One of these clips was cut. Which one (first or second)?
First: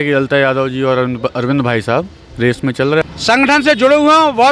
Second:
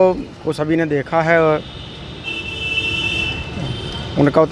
first